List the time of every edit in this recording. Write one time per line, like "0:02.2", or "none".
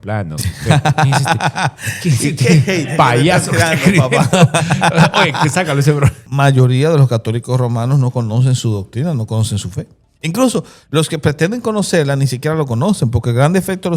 0:06.2